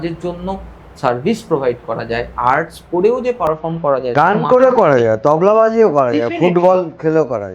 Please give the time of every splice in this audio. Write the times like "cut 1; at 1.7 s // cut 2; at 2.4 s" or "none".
cut 1; at 4.1 s